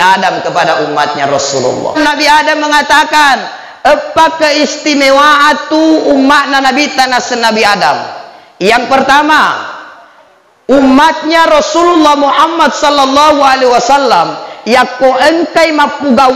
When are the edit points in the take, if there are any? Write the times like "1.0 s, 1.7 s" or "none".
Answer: 2.0 s